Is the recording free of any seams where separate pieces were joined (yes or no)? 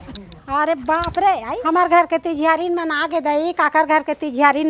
no